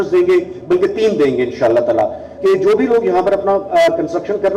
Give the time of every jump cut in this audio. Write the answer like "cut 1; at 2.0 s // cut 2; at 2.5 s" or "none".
cut 1; at 2.3 s